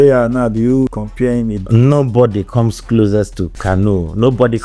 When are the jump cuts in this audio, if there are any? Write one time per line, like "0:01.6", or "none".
0:00.9
0:03.5